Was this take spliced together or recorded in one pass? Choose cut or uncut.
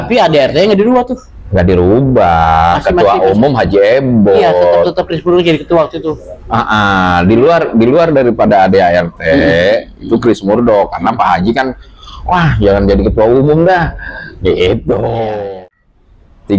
cut